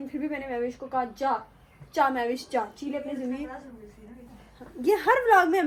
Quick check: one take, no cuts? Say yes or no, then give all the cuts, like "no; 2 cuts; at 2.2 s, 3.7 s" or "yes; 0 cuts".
yes; 0 cuts